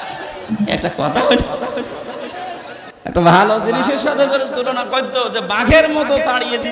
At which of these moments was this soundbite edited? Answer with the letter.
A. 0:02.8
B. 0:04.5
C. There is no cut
A